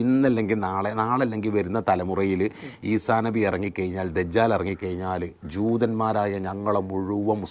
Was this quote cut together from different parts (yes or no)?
no